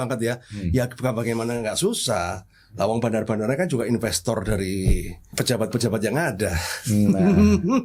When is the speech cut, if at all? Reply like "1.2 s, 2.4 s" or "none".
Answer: 5.2 s